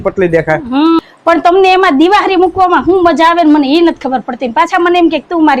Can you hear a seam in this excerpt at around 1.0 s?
yes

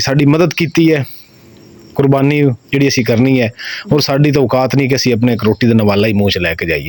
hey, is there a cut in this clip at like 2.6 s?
no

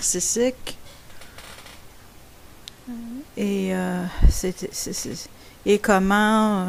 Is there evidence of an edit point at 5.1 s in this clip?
no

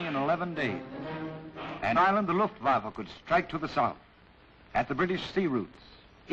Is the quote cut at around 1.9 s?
no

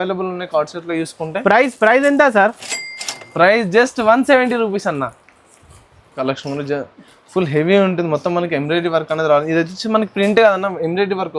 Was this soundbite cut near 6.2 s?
yes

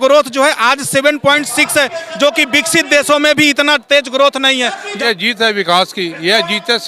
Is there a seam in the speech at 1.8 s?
no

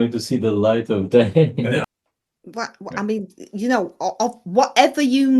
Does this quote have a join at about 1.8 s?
yes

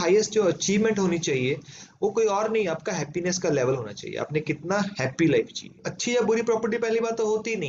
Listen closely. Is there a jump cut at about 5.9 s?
yes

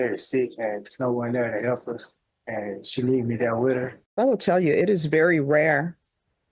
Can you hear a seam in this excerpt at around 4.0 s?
yes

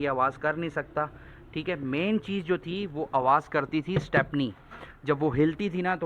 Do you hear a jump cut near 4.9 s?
no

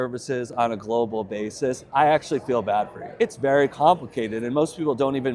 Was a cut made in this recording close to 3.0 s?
yes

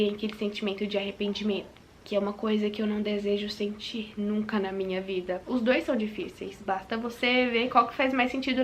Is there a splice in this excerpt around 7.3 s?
no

